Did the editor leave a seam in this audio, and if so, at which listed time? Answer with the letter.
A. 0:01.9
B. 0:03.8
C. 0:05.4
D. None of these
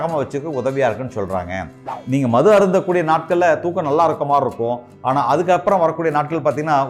A